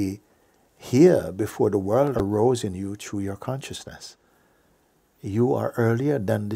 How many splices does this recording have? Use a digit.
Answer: 1